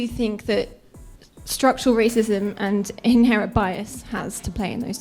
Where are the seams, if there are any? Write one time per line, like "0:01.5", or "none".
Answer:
none